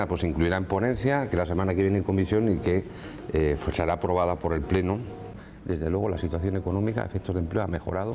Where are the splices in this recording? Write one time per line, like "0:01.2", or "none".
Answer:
0:05.3